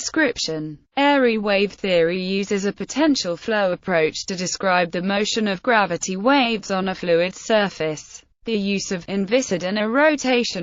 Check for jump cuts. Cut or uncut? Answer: uncut